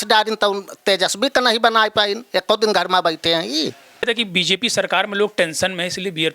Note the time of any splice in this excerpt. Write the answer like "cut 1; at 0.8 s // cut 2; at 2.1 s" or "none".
cut 1; at 4.1 s